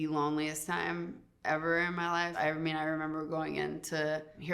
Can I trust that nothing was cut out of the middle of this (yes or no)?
no